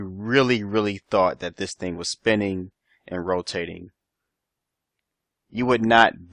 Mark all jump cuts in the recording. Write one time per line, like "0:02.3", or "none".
none